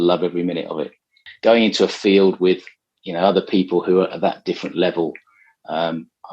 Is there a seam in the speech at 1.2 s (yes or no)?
yes